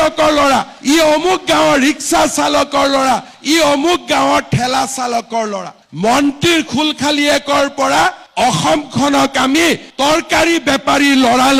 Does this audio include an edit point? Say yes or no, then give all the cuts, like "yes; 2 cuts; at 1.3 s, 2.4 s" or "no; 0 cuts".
no; 0 cuts